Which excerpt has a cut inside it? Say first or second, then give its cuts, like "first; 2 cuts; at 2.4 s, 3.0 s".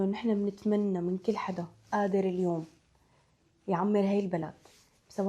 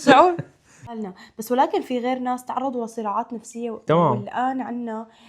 second; 1 cut; at 1.1 s